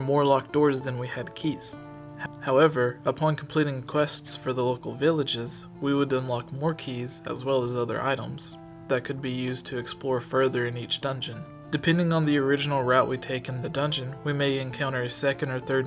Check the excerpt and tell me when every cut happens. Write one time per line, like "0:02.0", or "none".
none